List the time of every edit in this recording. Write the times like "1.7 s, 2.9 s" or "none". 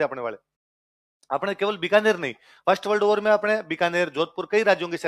none